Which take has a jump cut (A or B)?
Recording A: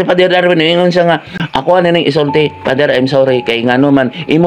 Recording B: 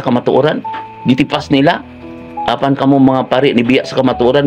A